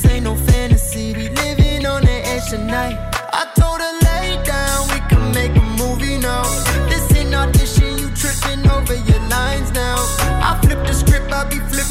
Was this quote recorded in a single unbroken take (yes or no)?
yes